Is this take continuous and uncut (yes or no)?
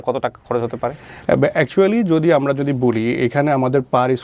yes